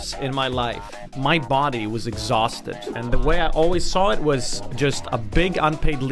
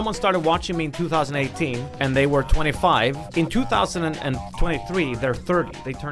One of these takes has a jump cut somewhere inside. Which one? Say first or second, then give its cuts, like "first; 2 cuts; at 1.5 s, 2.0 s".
first; 2 cuts; at 1.1 s, 2.9 s